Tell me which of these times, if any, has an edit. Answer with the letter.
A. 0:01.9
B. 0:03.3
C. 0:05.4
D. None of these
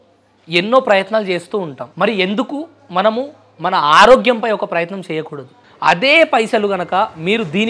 C